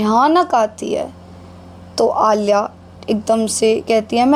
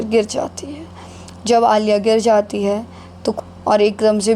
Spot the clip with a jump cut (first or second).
second